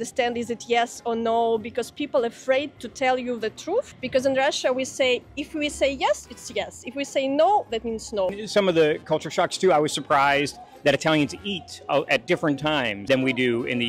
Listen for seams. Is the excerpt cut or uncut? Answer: uncut